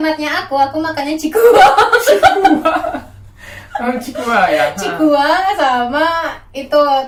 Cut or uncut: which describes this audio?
uncut